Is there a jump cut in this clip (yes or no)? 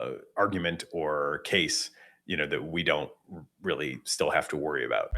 yes